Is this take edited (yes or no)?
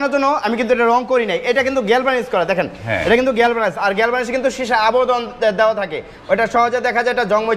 no